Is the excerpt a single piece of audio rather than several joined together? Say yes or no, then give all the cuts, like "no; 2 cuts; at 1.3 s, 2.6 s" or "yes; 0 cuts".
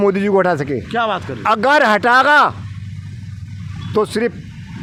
yes; 0 cuts